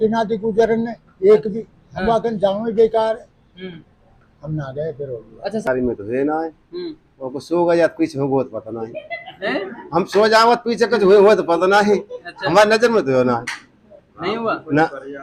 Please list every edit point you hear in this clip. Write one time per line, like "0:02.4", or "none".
0:05.7

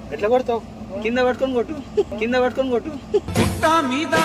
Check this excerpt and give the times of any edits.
none

